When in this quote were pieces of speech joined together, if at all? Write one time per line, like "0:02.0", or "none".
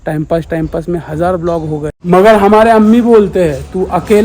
0:01.9